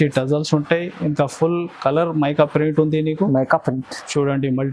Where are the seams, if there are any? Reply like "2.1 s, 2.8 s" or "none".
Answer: none